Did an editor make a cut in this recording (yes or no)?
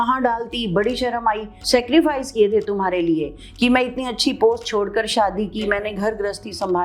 yes